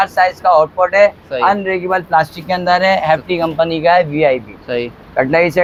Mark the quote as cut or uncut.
uncut